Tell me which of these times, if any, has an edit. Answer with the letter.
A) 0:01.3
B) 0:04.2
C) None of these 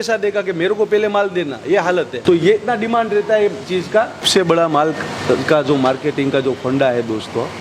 B